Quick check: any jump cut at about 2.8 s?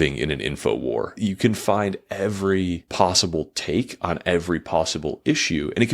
yes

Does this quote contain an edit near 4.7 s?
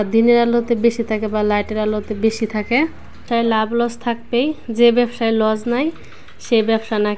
no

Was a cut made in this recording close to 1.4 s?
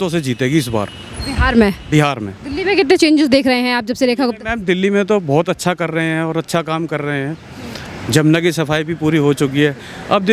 no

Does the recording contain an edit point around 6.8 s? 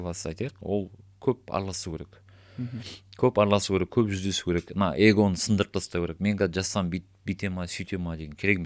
no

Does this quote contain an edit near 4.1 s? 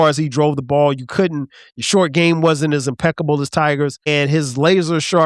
yes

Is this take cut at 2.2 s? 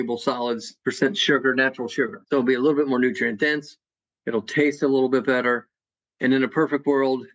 yes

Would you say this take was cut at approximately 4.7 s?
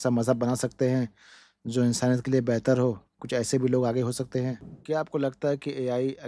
yes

